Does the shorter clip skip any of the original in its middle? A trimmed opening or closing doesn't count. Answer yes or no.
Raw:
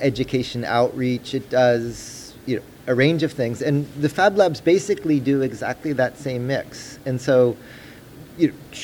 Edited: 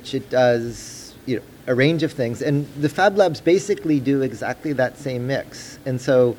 no